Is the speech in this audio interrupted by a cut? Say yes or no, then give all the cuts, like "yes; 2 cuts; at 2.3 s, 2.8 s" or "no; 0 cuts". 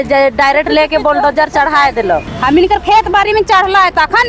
yes; 1 cut; at 2.3 s